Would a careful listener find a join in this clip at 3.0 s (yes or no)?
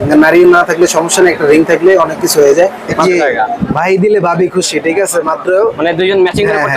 yes